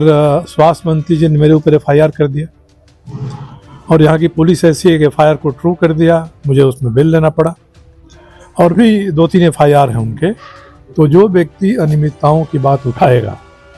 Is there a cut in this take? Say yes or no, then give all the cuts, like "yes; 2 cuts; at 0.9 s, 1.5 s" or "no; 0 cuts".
no; 0 cuts